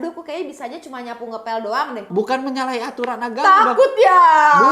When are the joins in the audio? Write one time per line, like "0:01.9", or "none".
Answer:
0:02.1